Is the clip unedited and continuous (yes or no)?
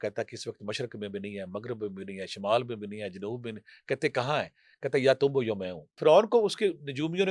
no